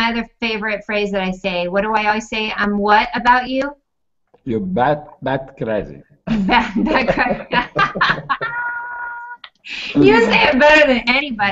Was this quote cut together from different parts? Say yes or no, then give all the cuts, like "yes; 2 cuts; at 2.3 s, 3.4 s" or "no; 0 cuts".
yes; 1 cut; at 4.0 s